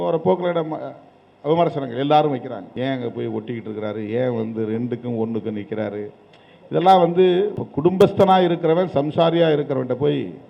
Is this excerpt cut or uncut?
cut